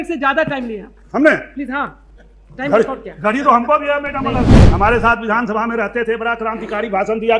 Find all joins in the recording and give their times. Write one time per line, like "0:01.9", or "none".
0:04.6

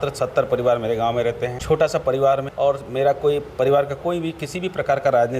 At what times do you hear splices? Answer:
0:01.6
0:02.5

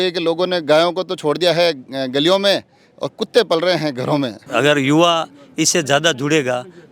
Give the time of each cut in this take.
0:04.4

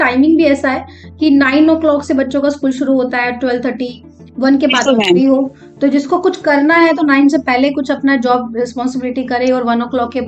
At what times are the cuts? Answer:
none

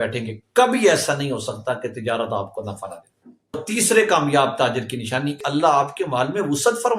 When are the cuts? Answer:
0:03.6
0:05.4

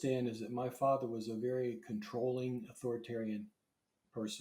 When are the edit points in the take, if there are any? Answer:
none

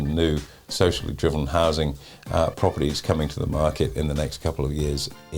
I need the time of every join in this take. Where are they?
none

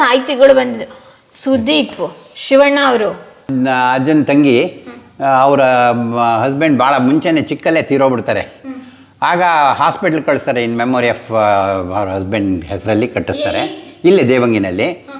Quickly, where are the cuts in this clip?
0:03.4

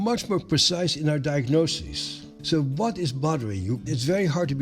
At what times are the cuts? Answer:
0:02.3
0:03.9

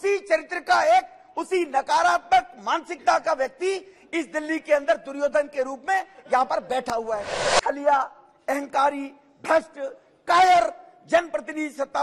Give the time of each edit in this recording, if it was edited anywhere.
0:07.4

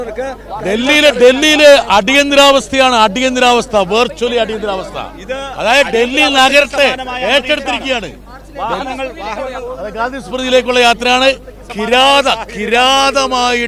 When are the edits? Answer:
none

